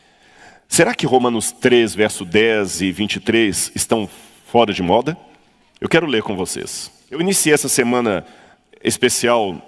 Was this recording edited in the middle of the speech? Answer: yes; 1 cut; at 7.2 s

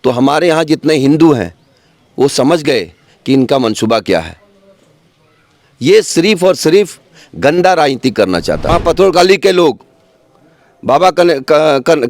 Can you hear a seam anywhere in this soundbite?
yes; 1 cut; at 8.7 s

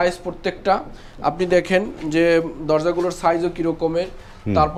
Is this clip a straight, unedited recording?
yes; 0 cuts

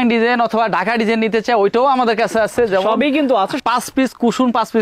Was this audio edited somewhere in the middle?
yes; 1 cut; at 3.6 s

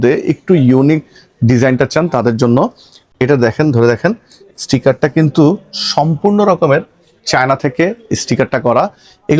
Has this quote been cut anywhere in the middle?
no; 0 cuts

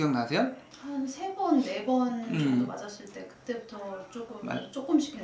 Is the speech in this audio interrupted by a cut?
no; 0 cuts

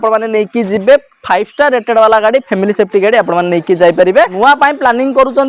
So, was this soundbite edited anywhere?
yes; 1 cut; at 4.3 s

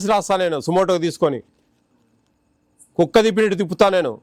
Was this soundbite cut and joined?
no; 0 cuts

